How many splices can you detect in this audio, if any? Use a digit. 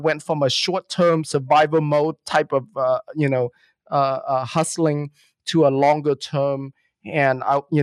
0